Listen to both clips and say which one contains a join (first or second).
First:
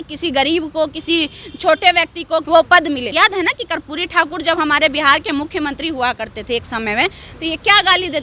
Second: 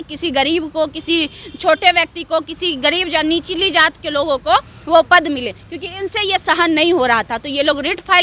first